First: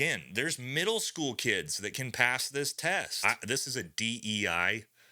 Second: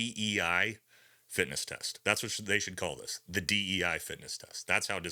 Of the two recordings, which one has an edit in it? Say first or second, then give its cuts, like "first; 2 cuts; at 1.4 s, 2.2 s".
first; 1 cut; at 3.1 s